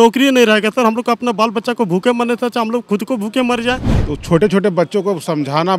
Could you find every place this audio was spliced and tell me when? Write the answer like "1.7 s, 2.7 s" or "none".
3.9 s